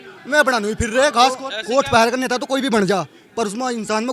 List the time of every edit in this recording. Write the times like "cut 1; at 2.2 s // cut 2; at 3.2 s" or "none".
cut 1; at 1.5 s